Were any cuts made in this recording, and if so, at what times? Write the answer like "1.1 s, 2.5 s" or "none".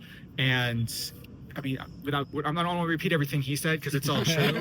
none